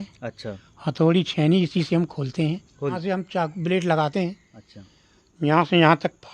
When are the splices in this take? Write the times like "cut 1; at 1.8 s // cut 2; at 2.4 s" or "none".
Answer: cut 1; at 3.0 s